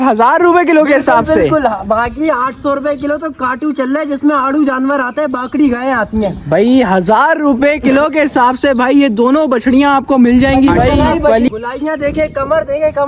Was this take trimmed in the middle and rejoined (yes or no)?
yes